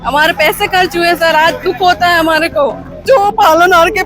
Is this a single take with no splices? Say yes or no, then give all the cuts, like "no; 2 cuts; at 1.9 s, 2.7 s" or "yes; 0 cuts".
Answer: no; 1 cut; at 3.0 s